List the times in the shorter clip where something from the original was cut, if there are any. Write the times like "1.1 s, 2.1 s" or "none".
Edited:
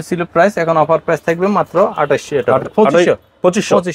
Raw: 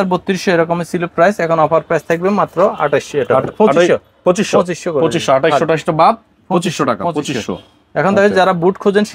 none